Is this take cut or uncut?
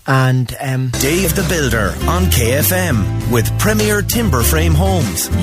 cut